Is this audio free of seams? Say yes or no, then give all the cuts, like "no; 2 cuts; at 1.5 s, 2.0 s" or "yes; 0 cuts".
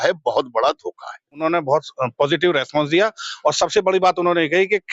no; 1 cut; at 1.4 s